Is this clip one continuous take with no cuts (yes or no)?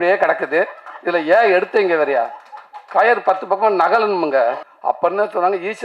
no